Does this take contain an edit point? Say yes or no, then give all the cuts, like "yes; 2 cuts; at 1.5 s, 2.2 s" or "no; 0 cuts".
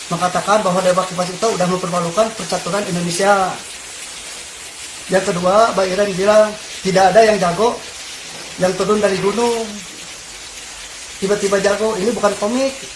no; 0 cuts